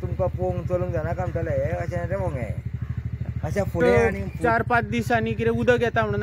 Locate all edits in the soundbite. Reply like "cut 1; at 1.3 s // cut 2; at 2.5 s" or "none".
cut 1; at 3.8 s